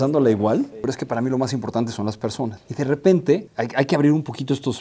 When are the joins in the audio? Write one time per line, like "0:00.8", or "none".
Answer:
0:00.8
0:02.6
0:03.6